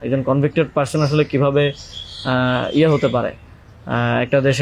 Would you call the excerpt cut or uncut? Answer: uncut